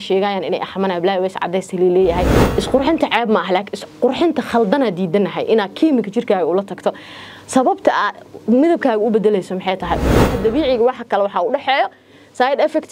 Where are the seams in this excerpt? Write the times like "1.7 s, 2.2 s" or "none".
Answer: 2.4 s, 10.3 s